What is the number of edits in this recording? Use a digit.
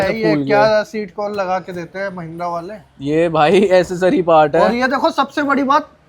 0